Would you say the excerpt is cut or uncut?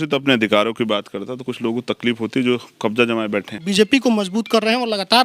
cut